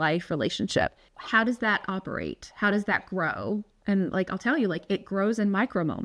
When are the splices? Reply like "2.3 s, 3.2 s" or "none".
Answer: 1.1 s